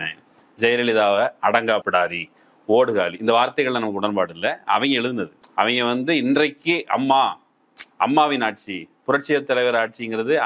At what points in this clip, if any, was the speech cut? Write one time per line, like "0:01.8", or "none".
none